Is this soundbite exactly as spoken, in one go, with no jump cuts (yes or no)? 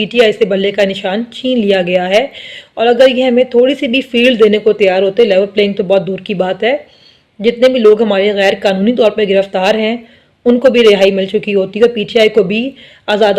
yes